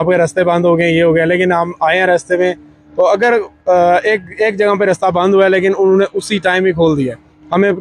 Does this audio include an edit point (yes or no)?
no